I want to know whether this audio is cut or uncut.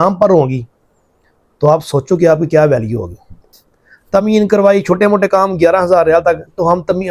cut